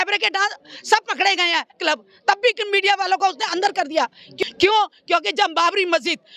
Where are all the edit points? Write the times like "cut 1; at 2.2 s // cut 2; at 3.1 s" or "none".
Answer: cut 1; at 4.3 s